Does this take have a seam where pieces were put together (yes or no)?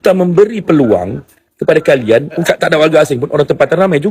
yes